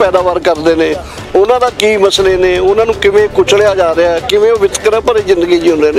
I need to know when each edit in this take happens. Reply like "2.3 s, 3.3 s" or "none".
none